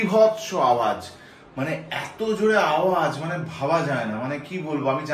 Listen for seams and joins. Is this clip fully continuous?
yes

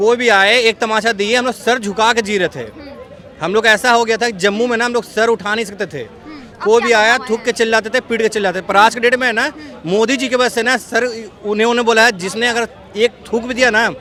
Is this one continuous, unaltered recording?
yes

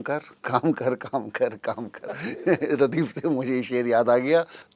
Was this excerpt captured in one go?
yes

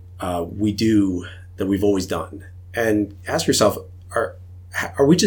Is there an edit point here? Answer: no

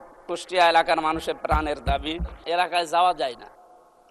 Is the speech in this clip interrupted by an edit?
yes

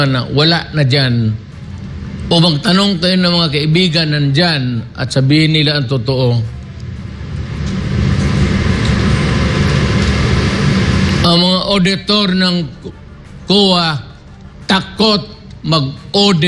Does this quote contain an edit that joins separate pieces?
no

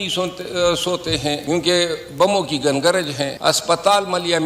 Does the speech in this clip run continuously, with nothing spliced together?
no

